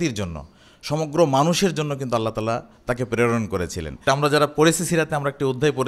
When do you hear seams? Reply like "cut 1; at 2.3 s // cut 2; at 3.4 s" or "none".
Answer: cut 1; at 3.9 s